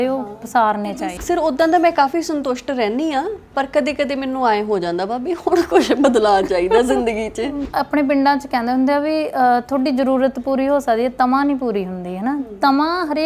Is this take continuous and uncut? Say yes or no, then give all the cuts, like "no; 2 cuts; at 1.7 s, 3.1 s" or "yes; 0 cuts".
no; 2 cuts; at 1.1 s, 7.6 s